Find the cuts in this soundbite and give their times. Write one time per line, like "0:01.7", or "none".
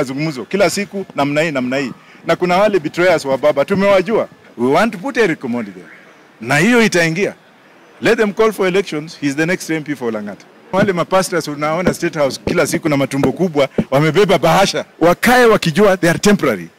0:04.4
0:10.7
0:14.8